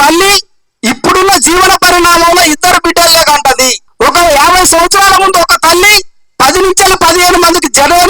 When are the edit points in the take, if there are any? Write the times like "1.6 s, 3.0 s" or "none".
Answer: 3.8 s